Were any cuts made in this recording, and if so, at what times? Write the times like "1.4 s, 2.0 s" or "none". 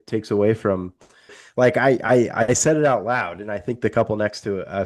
1.4 s